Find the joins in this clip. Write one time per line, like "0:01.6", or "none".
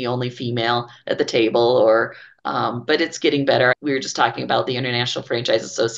0:03.7